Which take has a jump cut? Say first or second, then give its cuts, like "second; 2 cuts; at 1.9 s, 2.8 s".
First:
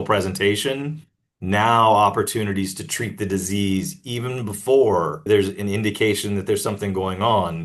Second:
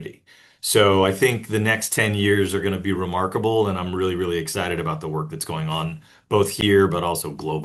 first; 1 cut; at 5.3 s